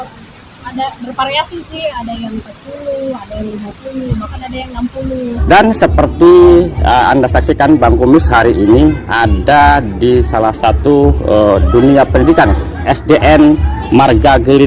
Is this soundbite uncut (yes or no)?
no